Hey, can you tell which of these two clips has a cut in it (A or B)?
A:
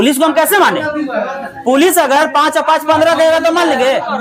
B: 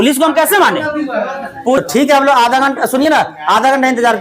B